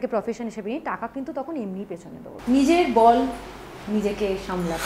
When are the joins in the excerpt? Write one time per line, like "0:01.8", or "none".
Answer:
0:02.3

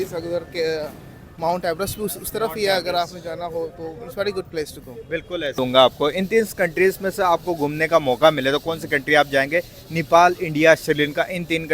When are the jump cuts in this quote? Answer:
0:05.6

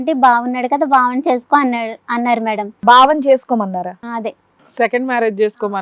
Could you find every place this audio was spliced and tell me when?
0:02.8

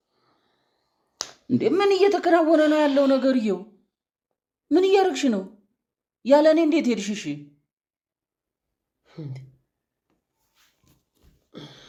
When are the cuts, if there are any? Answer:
none

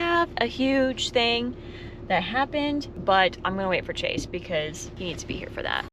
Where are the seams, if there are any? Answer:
none

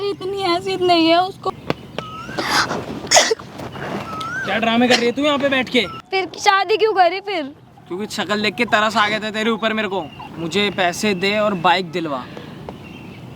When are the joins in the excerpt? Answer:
0:01.4
0:06.0
0:10.2

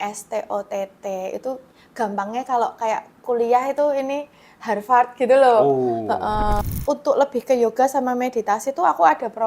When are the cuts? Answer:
0:06.6

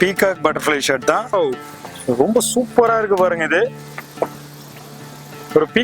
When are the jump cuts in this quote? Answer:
0:01.3

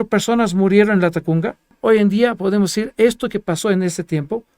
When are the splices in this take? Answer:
0:01.7

